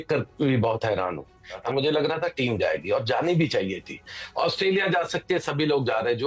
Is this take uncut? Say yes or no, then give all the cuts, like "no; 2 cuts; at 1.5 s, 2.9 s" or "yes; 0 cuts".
no; 1 cut; at 1.6 s